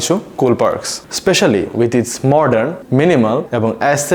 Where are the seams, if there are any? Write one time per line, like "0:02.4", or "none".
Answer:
0:01.0